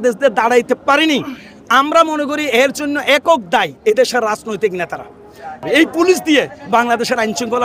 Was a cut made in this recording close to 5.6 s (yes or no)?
yes